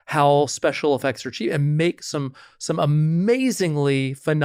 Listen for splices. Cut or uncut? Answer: uncut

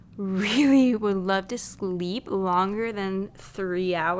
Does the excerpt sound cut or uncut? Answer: uncut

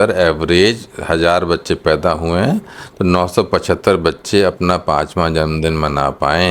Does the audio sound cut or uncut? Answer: uncut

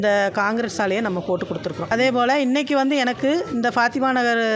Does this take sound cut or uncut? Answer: cut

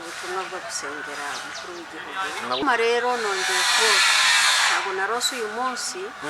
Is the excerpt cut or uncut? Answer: cut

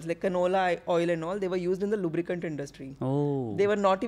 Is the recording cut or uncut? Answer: uncut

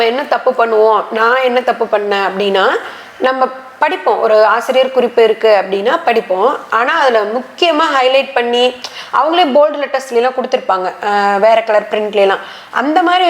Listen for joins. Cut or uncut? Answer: uncut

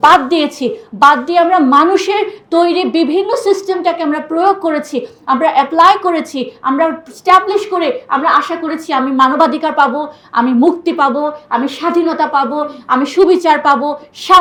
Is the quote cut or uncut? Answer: uncut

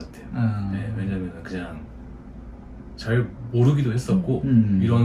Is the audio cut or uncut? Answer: uncut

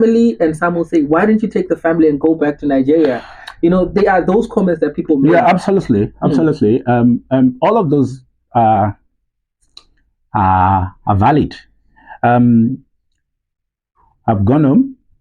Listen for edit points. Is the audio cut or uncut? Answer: uncut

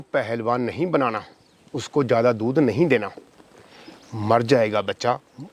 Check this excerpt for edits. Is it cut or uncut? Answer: uncut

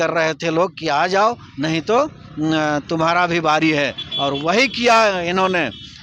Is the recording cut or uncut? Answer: uncut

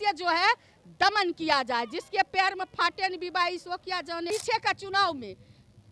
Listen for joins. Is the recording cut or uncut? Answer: cut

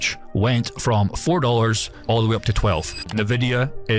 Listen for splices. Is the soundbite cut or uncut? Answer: cut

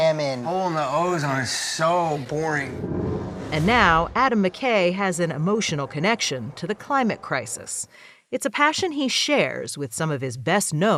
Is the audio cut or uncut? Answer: uncut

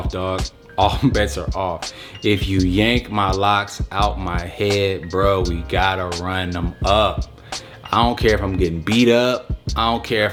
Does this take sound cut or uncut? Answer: uncut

